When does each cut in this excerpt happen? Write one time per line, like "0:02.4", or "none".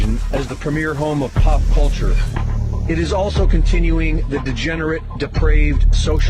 none